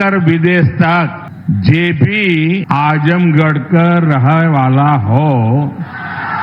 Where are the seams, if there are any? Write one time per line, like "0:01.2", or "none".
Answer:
0:01.3
0:02.6